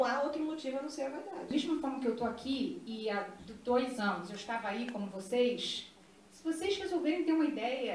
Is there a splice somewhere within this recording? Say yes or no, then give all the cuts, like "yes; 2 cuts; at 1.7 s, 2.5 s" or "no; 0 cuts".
yes; 1 cut; at 1.5 s